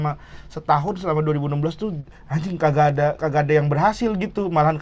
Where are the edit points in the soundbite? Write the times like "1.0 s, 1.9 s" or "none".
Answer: 2.0 s